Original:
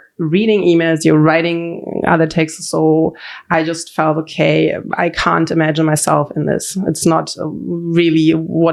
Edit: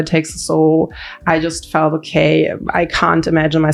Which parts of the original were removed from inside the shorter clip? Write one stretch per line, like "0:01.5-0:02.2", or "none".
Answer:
none